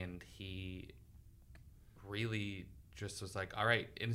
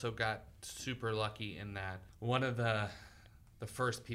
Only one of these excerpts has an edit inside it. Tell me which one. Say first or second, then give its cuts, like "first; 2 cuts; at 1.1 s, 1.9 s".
second; 1 cut; at 2.1 s